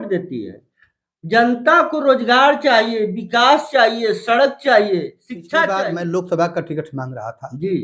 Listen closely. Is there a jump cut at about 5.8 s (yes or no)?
yes